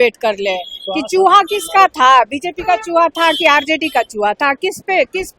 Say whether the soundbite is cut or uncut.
uncut